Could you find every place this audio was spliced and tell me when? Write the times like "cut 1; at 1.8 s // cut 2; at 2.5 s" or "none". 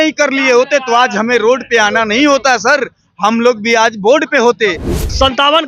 cut 1; at 4.8 s